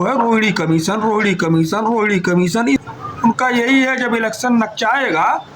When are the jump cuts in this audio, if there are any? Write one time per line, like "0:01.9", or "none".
0:02.8